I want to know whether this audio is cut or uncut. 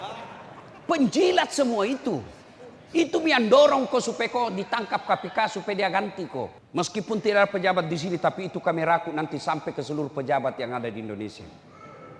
cut